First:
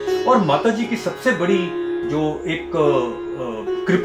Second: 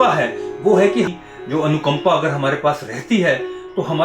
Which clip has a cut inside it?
second; 1 cut; at 1.1 s

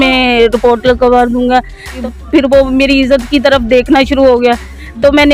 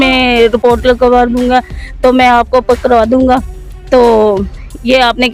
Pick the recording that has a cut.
first; 1 cut; at 2.0 s

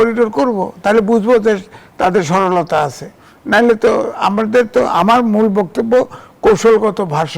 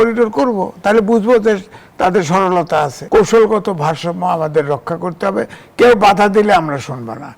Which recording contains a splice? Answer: second; 1 cut; at 3.0 s

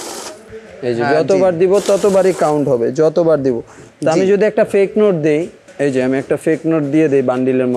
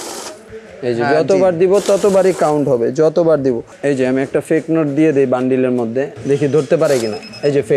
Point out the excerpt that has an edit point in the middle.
second; 2 cuts; at 3.7 s, 6.1 s

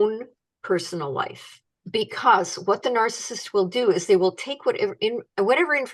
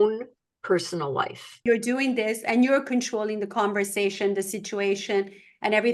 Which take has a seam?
second; 1 cut; at 1.6 s

